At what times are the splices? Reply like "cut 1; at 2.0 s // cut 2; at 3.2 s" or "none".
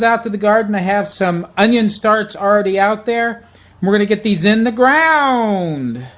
none